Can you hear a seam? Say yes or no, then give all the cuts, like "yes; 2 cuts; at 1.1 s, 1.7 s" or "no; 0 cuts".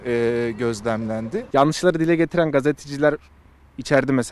yes; 1 cut; at 1.4 s